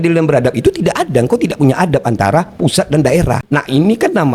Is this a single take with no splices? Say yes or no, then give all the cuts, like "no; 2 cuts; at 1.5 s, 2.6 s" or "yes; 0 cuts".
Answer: yes; 0 cuts